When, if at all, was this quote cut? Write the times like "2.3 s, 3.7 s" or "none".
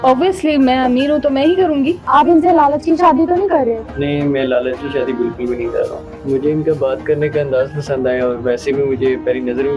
2.0 s, 6.1 s